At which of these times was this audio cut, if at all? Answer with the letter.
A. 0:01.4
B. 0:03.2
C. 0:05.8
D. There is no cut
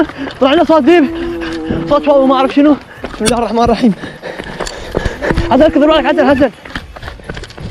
D